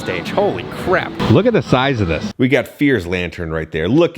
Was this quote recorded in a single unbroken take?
no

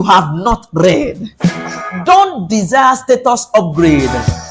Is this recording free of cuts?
yes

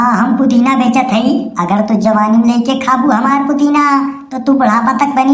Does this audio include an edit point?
no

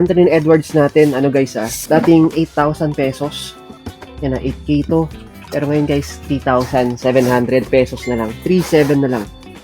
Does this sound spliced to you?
no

